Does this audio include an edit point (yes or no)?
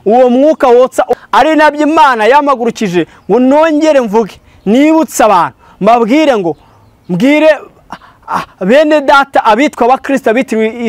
yes